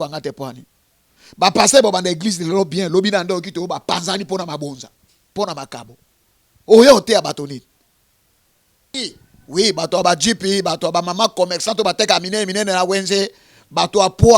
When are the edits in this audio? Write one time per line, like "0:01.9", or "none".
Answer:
0:08.9